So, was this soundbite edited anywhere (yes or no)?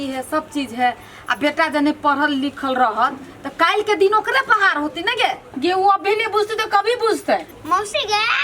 yes